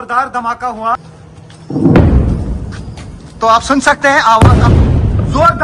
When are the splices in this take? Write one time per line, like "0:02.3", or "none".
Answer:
0:01.0